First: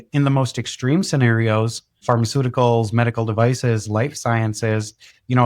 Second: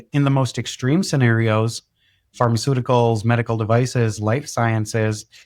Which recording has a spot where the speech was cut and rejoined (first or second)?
first